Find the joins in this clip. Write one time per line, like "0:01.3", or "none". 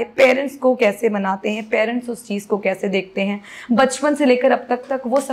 none